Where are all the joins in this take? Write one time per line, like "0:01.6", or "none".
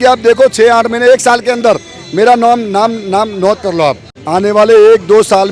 0:04.1